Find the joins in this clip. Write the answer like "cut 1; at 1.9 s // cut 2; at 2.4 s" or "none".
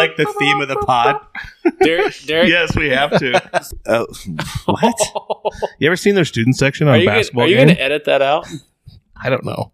cut 1; at 3.7 s